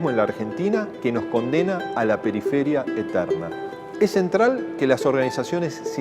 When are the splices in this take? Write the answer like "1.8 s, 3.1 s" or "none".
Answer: 4.7 s